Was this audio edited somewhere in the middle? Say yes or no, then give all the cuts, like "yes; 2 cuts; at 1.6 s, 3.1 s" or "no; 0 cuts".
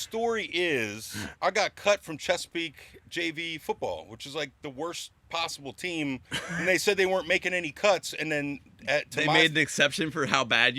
no; 0 cuts